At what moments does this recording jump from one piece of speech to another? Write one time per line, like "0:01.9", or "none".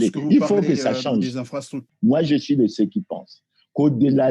0:01.8